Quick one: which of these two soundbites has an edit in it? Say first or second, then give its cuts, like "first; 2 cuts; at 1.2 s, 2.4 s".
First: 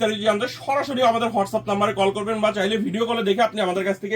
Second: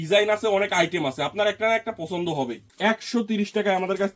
second; 1 cut; at 2.6 s